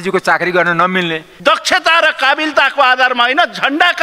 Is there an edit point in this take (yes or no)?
yes